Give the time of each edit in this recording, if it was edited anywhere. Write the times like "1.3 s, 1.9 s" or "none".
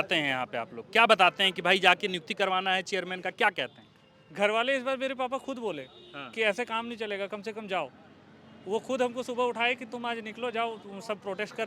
none